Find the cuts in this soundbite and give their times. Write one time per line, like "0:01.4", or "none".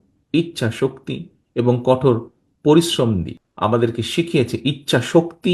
0:03.4